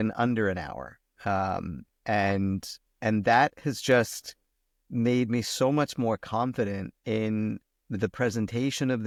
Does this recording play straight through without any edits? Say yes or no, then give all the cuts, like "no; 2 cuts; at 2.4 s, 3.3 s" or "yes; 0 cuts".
yes; 0 cuts